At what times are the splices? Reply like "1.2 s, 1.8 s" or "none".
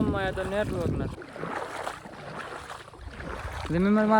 1.2 s